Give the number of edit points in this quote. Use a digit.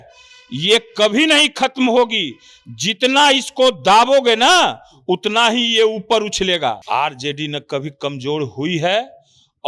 1